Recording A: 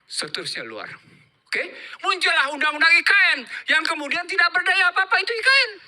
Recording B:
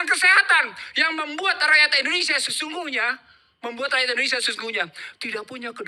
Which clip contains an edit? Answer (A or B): A